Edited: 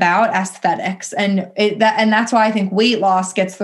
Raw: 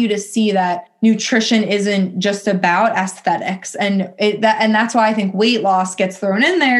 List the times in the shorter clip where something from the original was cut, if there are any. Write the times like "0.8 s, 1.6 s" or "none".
none